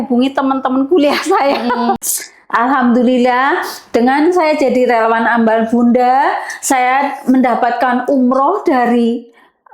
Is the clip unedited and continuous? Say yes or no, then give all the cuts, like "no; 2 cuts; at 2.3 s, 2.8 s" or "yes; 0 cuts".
no; 1 cut; at 2.0 s